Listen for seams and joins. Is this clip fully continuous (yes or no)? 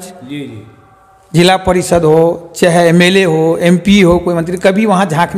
yes